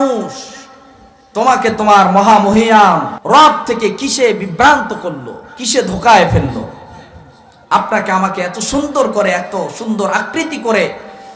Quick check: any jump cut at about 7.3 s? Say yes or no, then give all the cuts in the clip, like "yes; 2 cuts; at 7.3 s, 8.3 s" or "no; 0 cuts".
no; 1 cut; at 3.1 s